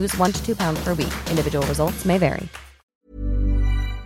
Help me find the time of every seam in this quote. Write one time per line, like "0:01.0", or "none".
0:02.9